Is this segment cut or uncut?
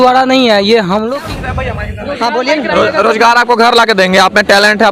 cut